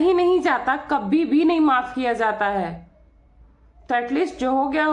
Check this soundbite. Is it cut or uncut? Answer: uncut